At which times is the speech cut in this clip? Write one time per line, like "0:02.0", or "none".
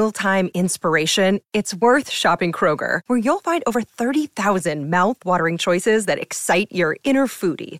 none